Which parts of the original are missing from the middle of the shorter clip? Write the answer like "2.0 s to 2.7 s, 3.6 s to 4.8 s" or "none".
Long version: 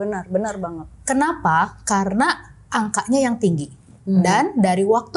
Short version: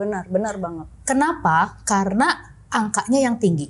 none